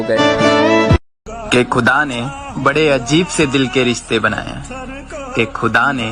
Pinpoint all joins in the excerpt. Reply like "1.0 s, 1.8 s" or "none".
1.1 s